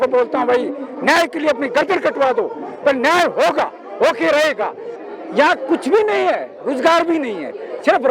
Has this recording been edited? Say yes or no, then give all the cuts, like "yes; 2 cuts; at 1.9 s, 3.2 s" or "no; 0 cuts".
yes; 1 cut; at 4.9 s